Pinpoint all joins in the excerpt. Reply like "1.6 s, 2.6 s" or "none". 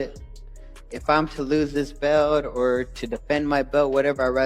2.5 s